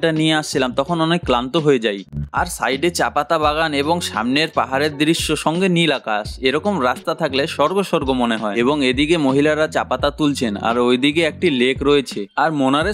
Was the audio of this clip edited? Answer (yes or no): yes